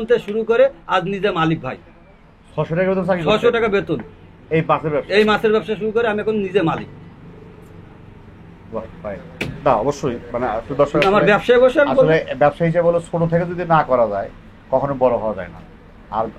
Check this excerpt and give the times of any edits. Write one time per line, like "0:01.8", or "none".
none